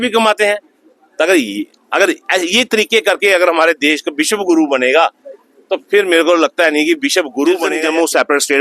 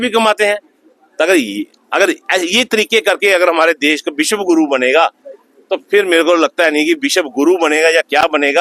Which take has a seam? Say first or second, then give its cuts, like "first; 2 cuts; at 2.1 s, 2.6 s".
first; 1 cut; at 7.7 s